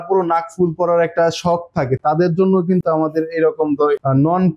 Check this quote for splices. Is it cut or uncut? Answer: uncut